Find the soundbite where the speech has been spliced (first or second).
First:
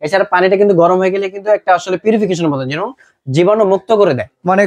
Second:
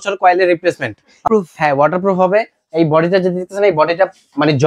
second